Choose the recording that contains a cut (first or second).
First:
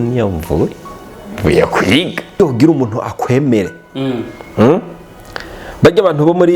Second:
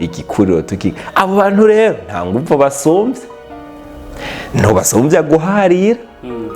first